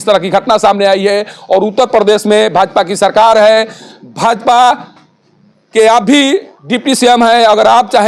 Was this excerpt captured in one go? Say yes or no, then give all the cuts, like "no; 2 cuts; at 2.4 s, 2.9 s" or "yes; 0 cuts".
yes; 0 cuts